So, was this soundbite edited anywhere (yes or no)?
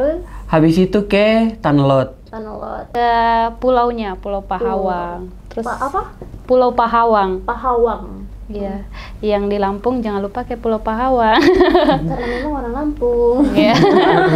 yes